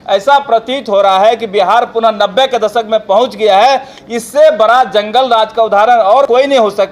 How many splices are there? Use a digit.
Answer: 0